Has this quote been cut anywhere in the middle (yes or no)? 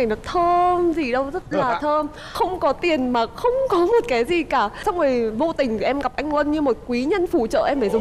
yes